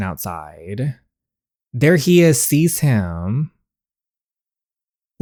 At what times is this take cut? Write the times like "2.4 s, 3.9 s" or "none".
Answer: none